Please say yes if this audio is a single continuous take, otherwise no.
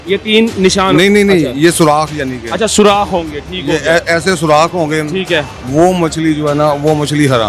yes